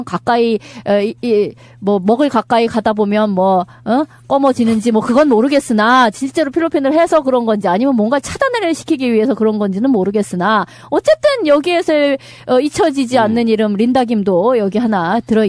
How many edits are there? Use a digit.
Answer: 1